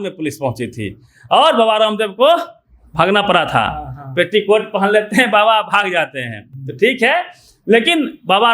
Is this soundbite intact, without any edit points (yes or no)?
yes